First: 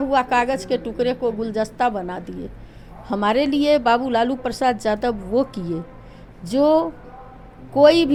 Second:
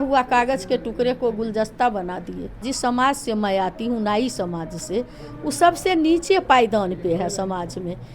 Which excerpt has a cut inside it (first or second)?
second